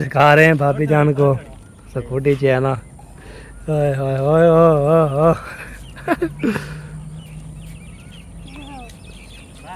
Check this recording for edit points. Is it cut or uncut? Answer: uncut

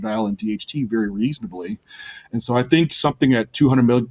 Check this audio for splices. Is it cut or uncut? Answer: uncut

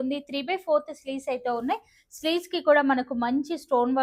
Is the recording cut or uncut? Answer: uncut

